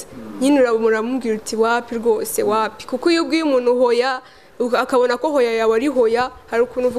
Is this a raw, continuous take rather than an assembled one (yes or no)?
yes